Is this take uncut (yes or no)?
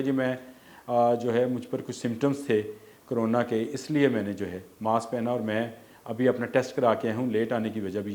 yes